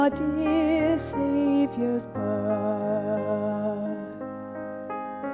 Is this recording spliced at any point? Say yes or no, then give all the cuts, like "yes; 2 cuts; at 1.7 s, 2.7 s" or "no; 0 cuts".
yes; 1 cut; at 3.9 s